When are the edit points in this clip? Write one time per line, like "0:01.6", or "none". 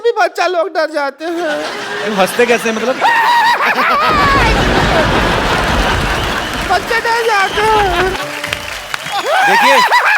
none